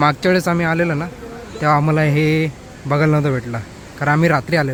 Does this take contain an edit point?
no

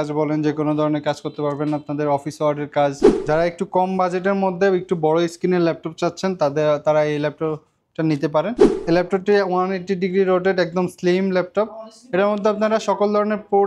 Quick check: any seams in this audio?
yes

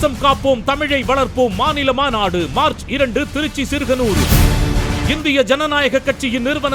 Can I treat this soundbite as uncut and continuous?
yes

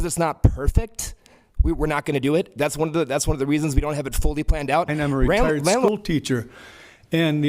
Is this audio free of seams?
no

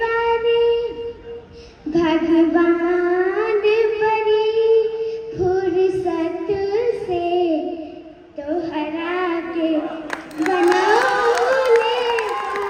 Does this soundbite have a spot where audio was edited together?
no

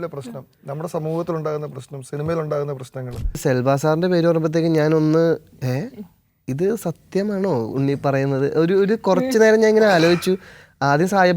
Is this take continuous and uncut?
no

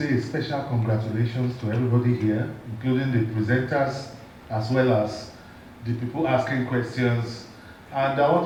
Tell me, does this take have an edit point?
no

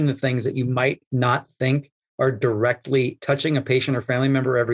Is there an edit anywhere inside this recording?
yes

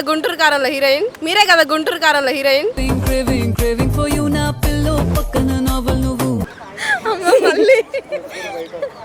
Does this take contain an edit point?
no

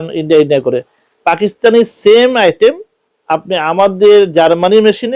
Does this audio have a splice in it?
no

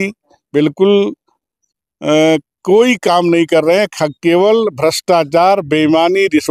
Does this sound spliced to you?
no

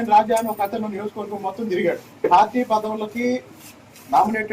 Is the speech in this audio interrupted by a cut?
yes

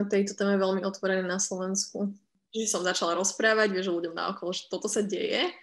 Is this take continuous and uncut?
no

